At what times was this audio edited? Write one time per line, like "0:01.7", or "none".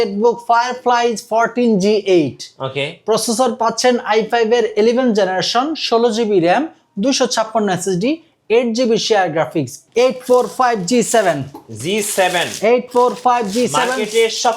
0:09.8